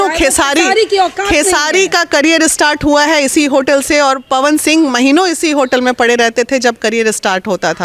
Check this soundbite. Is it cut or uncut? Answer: uncut